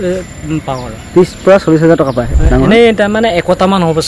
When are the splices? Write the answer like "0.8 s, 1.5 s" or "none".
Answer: 2.3 s